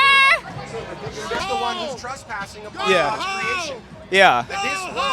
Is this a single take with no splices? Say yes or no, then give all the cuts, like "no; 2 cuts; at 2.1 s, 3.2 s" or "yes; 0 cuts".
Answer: no; 1 cut; at 1.4 s